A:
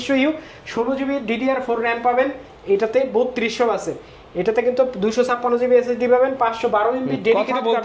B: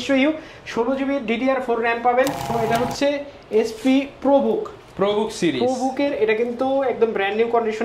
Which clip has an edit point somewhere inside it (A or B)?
B